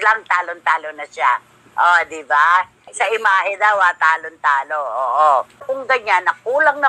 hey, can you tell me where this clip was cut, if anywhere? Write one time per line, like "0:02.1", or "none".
0:05.7

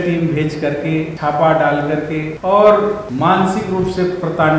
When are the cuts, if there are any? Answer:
0:01.1
0:02.3
0:03.1

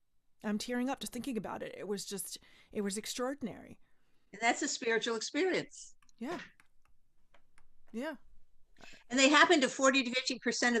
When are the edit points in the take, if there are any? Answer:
none

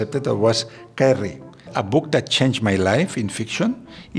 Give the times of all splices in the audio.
0:01.7

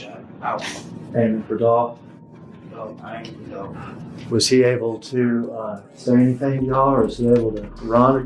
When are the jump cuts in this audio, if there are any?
0:01.1

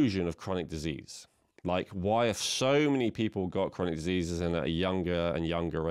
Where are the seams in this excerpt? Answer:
none

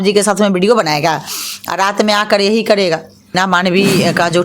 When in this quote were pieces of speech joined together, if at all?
0:03.4

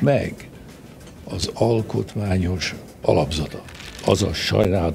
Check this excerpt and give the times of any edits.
0:04.0

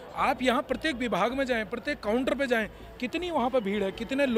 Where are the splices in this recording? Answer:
none

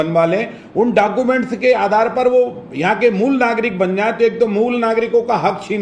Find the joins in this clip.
none

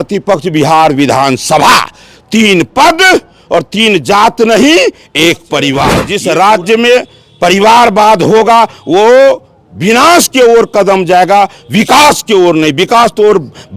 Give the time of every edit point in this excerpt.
0:06.0

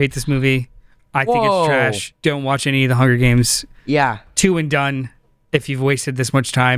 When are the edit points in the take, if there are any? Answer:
0:02.1

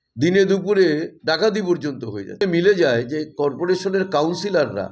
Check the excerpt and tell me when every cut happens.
0:02.4

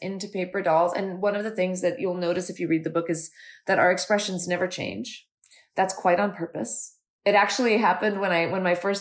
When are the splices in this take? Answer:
none

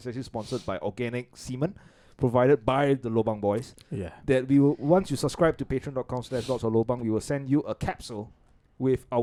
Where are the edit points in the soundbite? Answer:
none

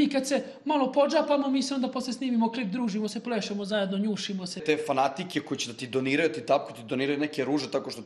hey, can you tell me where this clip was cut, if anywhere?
0:04.6

